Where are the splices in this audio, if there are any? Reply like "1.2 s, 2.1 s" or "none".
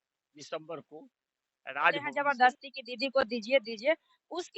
2.1 s